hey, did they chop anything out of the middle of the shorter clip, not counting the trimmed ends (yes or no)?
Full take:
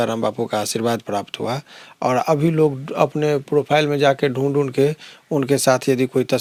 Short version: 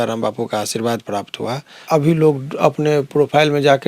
yes